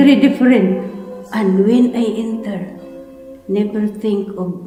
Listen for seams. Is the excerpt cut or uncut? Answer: uncut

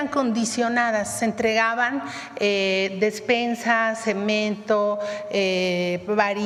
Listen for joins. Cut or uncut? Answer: uncut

